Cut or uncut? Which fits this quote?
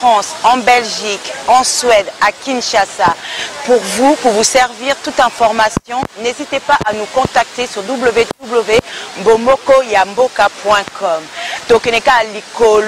uncut